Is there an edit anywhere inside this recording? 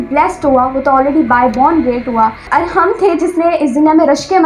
yes; 1 cut; at 2.4 s

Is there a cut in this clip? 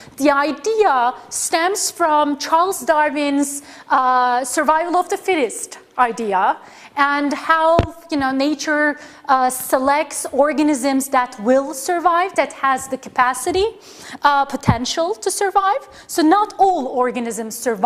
yes; 1 cut; at 9.8 s

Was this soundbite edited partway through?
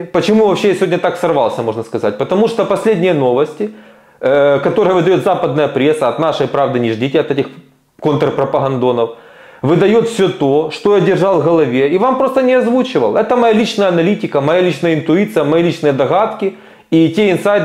no; 0 cuts

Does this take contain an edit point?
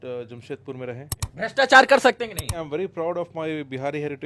yes; 2 cuts; at 1.2 s, 2.5 s

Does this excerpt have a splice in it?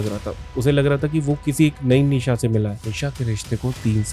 yes; 1 cut; at 2.8 s

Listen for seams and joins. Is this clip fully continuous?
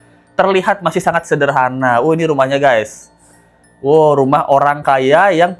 yes; 0 cuts

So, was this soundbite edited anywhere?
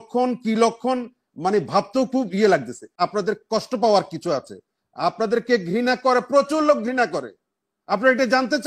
yes; 1 cut; at 2.9 s

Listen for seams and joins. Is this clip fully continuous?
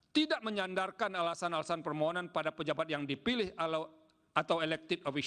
yes; 0 cuts

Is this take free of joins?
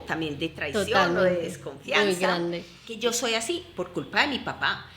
no; 1 cut; at 2.9 s

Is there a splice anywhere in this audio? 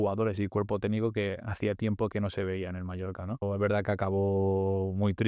yes; 1 cut; at 3.4 s

